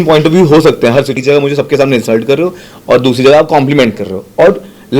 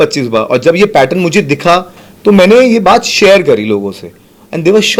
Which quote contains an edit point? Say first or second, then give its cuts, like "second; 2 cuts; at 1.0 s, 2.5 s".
first; 1 cut; at 1.2 s